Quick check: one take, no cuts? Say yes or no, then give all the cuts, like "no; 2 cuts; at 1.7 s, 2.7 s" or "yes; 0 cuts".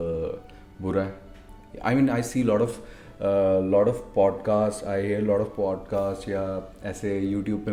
yes; 0 cuts